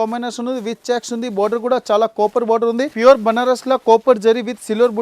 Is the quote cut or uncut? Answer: cut